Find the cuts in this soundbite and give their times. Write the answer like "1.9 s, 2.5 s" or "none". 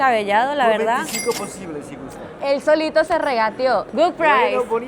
2.4 s, 3.9 s